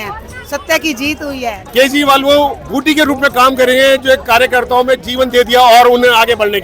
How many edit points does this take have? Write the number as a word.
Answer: one